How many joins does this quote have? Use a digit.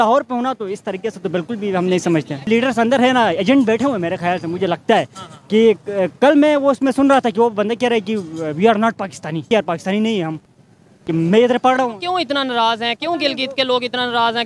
2